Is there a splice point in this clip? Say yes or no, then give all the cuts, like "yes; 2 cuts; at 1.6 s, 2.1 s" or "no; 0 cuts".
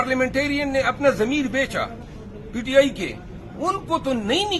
no; 0 cuts